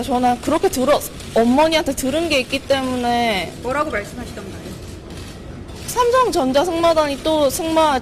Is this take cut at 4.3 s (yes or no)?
yes